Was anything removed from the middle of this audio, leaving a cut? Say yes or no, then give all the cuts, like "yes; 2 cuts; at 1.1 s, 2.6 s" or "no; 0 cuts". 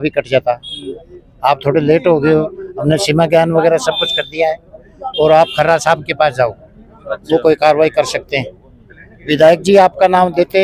no; 0 cuts